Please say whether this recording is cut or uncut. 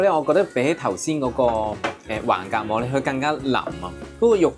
uncut